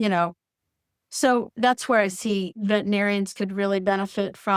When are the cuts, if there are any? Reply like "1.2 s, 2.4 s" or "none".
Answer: none